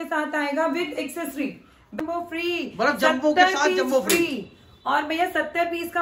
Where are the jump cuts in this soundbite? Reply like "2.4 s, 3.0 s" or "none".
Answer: 2.0 s